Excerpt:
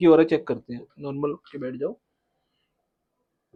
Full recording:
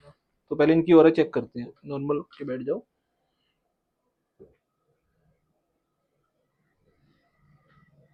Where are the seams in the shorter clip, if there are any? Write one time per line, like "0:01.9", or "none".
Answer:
none